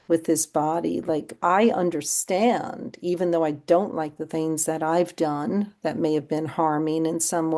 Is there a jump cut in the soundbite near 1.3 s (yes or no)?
yes